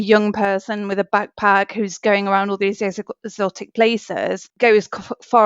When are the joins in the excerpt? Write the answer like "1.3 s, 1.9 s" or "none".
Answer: 4.5 s